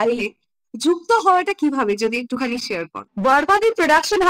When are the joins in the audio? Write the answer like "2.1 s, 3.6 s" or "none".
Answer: 3.0 s